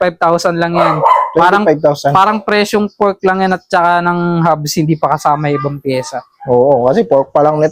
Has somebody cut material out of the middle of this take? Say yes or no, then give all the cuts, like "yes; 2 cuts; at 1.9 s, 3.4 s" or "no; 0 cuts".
no; 0 cuts